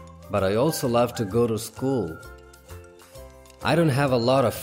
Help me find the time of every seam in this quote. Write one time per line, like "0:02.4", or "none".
0:02.2
0:03.6